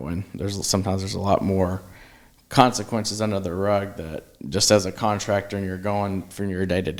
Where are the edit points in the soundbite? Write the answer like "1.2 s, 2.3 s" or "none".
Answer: none